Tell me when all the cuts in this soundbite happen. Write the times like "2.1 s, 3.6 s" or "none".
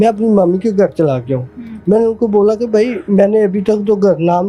none